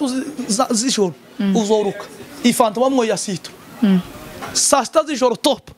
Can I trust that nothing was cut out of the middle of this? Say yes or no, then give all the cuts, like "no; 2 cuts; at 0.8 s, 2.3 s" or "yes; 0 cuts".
yes; 0 cuts